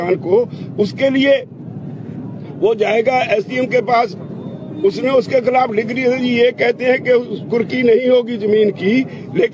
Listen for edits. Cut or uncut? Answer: uncut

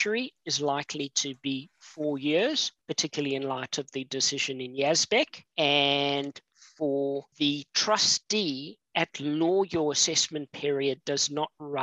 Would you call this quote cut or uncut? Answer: cut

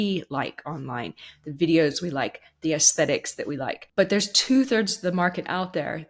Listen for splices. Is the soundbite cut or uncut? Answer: cut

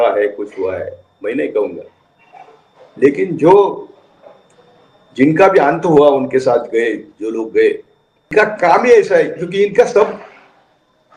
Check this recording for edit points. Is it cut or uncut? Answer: uncut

